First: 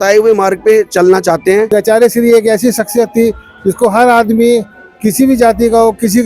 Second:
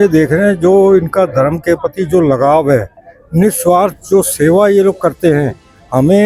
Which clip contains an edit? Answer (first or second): first